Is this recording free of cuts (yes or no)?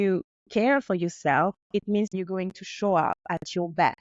no